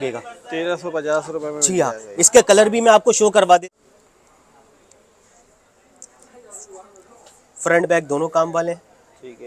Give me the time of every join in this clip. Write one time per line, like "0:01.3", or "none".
0:03.6